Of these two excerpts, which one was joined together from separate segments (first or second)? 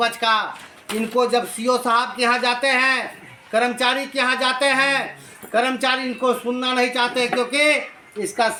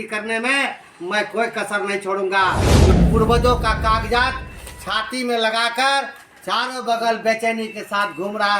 second